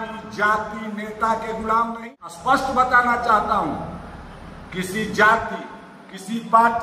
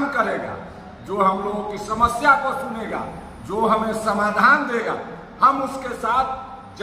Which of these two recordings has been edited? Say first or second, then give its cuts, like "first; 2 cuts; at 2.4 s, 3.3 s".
first; 1 cut; at 2.0 s